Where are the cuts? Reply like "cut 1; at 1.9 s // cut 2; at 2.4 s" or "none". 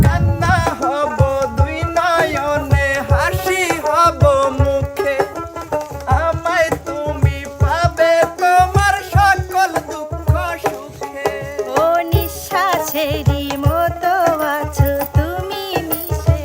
none

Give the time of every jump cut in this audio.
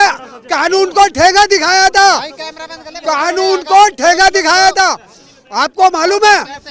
none

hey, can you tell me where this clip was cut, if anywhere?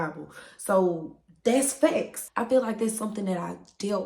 cut 1; at 2.2 s

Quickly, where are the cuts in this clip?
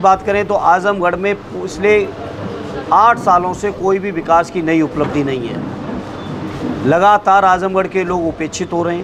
none

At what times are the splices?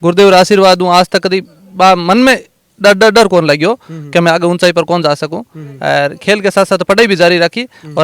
none

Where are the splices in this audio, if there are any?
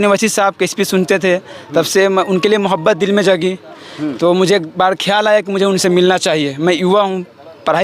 none

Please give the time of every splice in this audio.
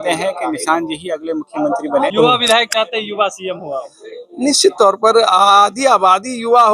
cut 1; at 2.1 s

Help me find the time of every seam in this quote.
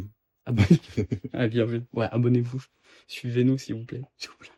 none

